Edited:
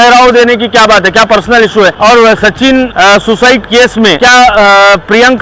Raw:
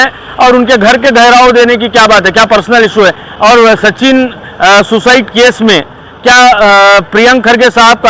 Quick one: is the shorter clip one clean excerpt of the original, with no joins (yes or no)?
no